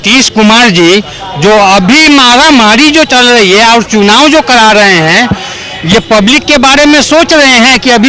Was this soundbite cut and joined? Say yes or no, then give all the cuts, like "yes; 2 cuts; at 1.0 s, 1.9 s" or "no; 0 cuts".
no; 0 cuts